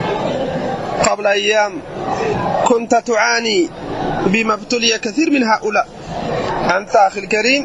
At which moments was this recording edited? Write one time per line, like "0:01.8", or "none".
0:02.4
0:06.5